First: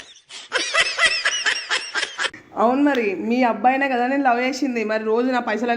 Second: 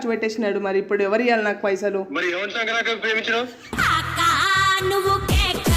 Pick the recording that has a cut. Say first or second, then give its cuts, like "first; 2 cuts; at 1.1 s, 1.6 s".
first; 1 cut; at 2.4 s